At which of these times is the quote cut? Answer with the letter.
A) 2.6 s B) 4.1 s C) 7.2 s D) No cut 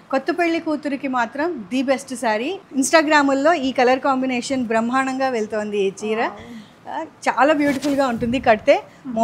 A